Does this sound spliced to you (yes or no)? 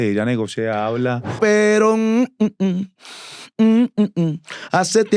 yes